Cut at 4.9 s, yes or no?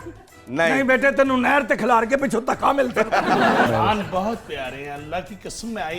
no